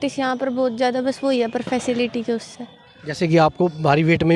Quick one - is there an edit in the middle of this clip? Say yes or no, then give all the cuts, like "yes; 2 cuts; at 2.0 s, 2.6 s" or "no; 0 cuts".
no; 0 cuts